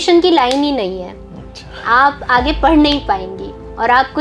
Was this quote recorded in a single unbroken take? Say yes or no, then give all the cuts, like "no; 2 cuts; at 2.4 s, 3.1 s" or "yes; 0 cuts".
yes; 0 cuts